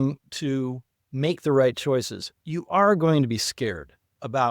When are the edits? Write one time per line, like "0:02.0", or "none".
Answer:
none